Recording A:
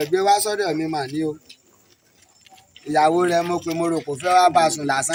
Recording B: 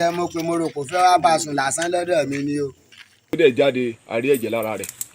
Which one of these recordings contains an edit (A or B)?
B